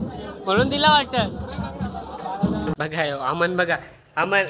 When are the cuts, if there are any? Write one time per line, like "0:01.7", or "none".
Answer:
0:02.7